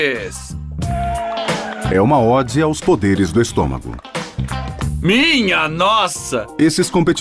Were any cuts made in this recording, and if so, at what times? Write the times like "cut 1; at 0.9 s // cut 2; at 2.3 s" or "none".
cut 1; at 6.2 s